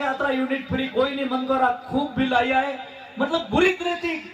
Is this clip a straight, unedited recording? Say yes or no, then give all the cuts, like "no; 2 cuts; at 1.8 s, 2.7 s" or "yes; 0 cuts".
yes; 0 cuts